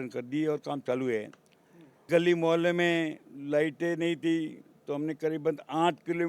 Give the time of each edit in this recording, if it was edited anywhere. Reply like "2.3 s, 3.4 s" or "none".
2.1 s